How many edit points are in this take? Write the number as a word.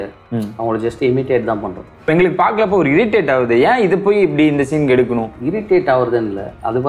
two